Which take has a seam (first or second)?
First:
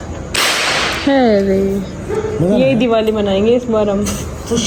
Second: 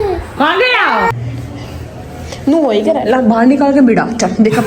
second